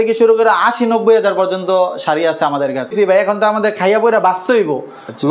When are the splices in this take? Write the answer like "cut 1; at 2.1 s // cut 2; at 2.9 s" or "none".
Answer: cut 1; at 2.9 s